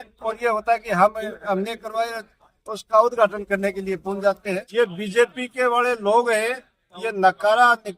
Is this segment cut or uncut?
cut